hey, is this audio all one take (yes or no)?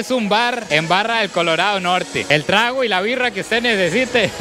yes